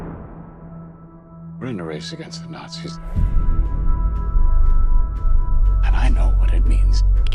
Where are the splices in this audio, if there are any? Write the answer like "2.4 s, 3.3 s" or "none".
none